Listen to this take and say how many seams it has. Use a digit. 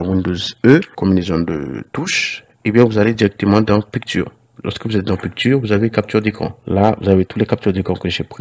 2